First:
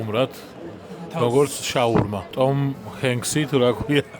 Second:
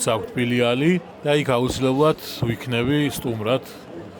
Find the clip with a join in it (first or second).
first